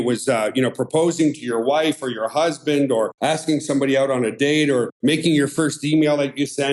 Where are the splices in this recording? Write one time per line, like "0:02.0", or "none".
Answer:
0:03.1
0:04.9